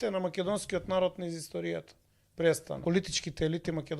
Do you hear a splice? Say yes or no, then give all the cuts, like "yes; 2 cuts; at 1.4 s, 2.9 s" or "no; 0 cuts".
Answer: yes; 1 cut; at 2.8 s